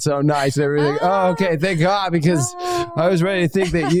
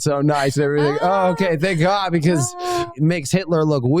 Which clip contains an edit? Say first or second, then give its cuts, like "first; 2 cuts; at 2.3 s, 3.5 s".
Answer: second; 1 cut; at 2.9 s